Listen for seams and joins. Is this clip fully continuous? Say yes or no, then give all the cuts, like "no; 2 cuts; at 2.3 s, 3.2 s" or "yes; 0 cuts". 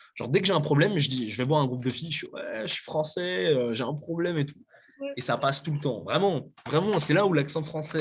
yes; 0 cuts